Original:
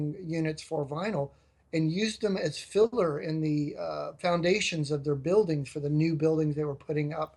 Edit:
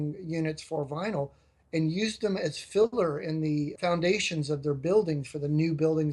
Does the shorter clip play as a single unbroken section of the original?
no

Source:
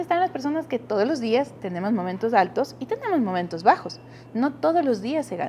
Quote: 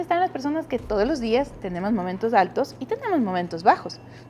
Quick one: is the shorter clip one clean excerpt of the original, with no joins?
yes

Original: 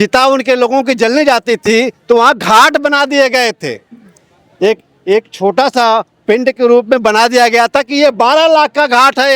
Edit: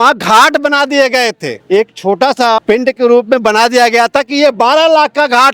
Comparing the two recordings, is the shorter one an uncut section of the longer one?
no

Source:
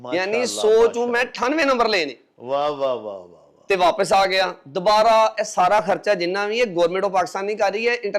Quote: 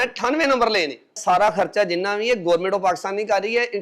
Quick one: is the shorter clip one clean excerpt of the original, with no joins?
no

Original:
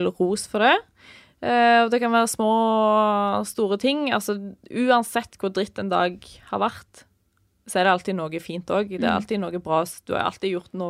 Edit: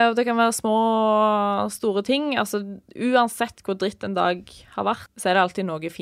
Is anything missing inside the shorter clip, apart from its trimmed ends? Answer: yes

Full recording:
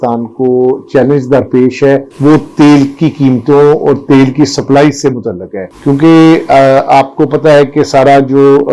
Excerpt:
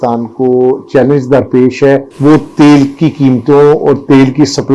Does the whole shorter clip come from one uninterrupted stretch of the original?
yes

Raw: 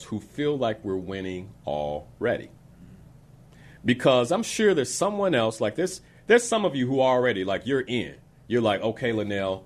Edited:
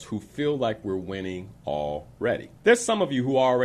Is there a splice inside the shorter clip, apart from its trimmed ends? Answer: yes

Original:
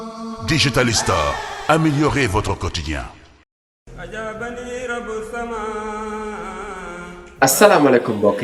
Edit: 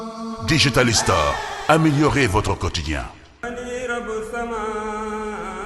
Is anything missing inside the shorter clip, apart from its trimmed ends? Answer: yes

